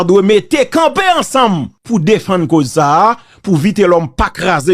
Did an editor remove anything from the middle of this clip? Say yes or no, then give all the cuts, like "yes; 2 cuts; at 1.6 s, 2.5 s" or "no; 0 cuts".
yes; 1 cut; at 1.7 s